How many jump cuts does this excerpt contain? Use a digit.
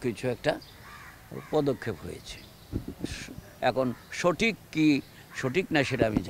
0